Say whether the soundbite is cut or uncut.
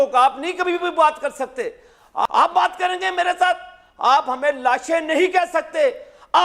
cut